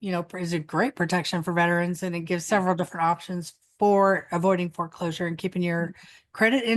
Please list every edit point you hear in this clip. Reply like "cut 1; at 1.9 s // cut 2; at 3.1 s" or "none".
none